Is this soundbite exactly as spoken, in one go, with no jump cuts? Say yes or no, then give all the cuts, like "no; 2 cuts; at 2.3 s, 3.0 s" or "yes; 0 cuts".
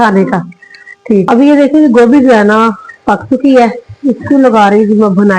no; 1 cut; at 1.3 s